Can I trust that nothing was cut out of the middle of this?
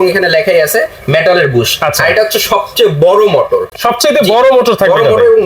yes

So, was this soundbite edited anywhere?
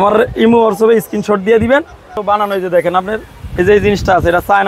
yes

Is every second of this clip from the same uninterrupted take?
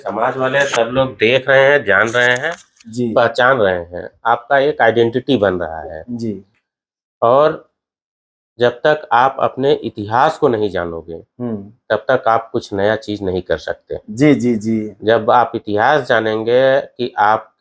yes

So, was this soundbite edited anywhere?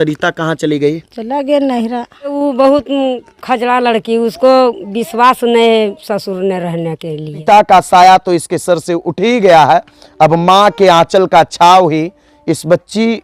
yes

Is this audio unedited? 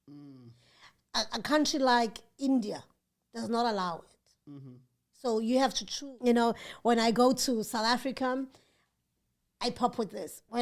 no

